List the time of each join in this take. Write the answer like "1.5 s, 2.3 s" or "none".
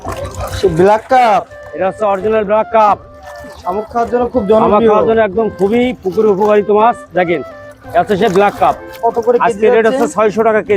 8.9 s

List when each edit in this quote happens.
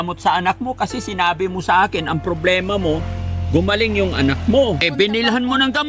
4.8 s

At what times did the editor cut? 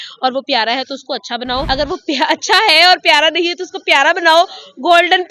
1.6 s

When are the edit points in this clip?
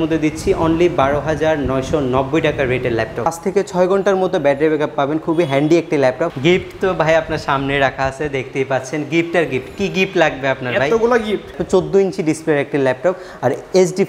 3.2 s, 6.3 s, 11.5 s

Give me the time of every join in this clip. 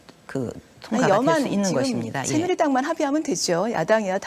1.5 s

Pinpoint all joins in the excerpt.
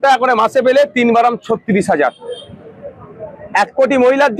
none

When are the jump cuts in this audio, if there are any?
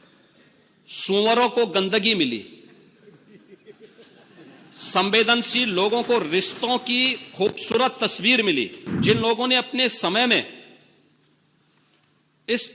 8.8 s

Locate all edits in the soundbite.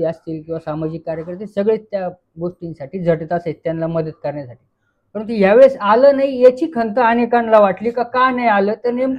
none

